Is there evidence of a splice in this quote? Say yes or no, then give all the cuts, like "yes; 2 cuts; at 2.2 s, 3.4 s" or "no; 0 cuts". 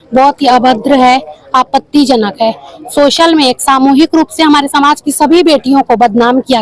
no; 0 cuts